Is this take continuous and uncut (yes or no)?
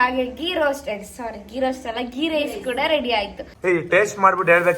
no